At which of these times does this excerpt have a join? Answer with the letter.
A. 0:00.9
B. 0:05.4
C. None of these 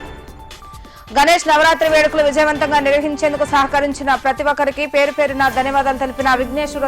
A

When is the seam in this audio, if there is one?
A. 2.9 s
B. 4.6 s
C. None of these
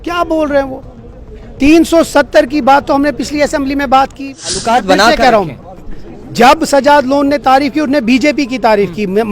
B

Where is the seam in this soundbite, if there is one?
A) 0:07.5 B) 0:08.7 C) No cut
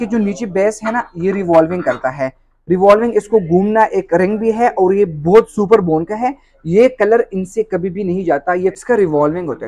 B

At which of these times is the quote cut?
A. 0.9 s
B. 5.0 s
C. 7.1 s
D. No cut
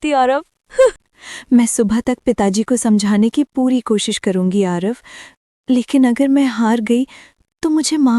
A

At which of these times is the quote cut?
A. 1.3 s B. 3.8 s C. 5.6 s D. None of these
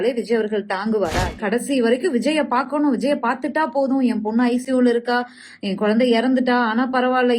A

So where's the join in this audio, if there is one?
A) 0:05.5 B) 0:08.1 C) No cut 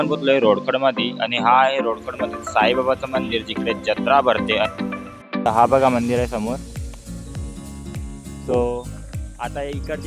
A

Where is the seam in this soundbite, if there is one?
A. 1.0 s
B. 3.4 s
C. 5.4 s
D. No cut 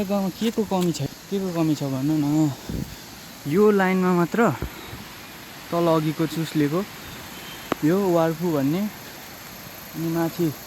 A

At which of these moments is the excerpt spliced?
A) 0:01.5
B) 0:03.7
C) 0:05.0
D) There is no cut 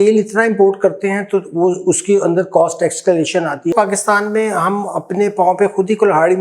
B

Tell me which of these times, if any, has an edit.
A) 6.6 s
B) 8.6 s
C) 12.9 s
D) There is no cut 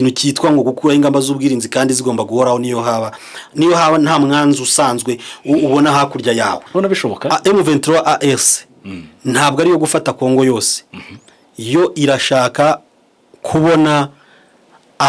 A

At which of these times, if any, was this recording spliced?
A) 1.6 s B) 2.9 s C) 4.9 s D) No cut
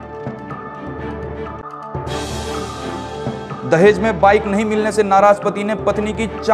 D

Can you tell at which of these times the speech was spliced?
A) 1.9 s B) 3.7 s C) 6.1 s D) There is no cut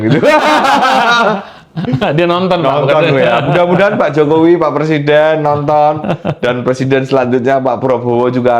D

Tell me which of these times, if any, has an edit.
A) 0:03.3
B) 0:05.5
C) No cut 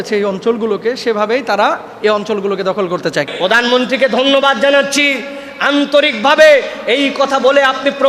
A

